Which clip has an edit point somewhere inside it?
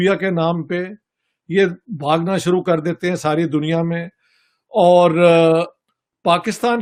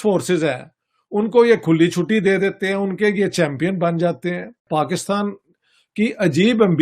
second; 1 cut; at 4.6 s

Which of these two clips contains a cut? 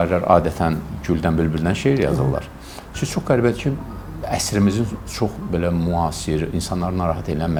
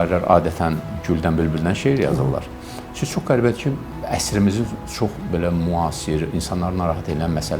second; 1 cut; at 3.9 s

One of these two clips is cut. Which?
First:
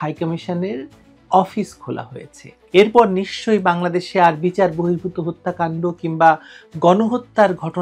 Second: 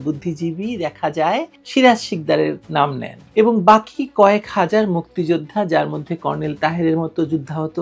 first; 1 cut; at 2.5 s

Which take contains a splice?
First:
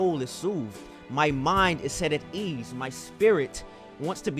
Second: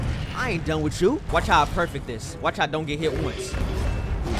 second; 2 cuts; at 1.3 s, 3.6 s

